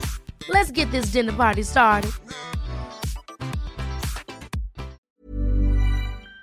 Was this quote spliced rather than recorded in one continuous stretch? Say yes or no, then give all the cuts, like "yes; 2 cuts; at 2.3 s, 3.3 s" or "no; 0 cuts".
yes; 1 cut; at 5.0 s